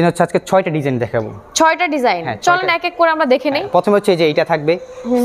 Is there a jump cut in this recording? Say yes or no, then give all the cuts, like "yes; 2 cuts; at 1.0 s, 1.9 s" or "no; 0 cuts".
no; 0 cuts